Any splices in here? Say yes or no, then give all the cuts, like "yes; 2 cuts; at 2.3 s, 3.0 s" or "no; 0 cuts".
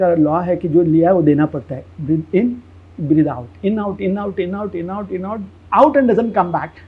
no; 0 cuts